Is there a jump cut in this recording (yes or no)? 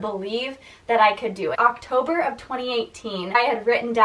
yes